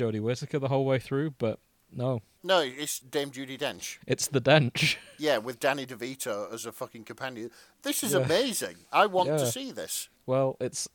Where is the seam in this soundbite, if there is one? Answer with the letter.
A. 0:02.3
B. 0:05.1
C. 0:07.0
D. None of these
A